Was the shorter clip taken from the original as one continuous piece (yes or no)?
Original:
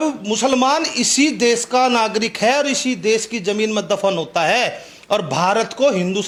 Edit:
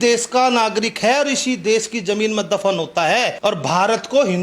no